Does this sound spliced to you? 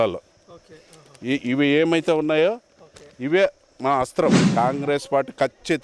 yes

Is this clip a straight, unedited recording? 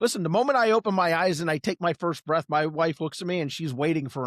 yes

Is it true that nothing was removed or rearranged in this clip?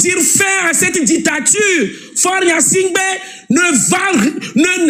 yes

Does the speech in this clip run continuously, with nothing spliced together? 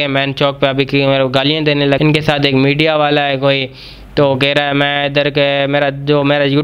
no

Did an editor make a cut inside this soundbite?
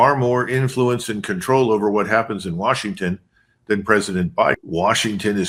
no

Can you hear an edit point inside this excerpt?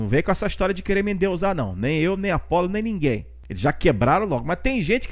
no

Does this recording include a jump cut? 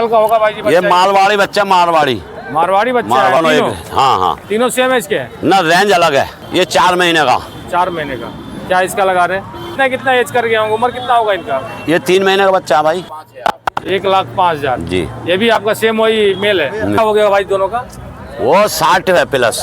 yes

